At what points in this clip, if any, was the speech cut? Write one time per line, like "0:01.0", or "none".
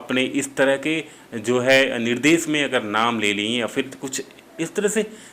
none